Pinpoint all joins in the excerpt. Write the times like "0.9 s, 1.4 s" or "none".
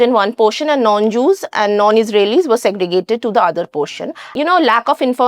4.3 s